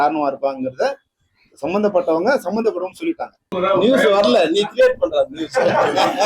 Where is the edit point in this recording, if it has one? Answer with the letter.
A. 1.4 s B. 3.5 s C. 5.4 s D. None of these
B